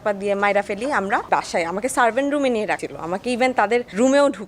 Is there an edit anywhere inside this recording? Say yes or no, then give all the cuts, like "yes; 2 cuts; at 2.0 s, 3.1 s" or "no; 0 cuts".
yes; 1 cut; at 1.3 s